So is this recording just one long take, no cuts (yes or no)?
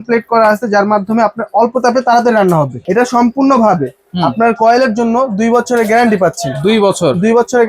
no